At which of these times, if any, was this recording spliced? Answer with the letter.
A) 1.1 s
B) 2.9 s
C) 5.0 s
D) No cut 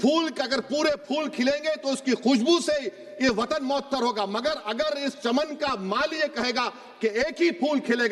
D